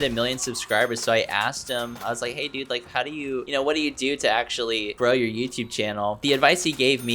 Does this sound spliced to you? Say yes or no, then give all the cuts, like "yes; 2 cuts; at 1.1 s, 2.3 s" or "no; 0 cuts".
no; 0 cuts